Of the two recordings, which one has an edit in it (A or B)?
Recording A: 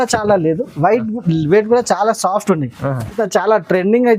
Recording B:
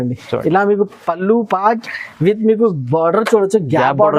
A